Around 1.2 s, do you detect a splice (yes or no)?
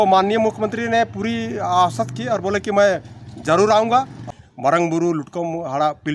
no